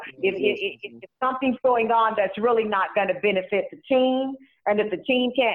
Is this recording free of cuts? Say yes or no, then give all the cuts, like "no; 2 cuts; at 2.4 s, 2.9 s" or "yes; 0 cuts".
yes; 0 cuts